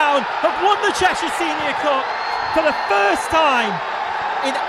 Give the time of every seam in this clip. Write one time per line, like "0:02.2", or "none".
none